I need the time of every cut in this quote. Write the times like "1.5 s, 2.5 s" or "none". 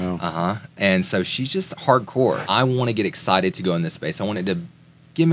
2.4 s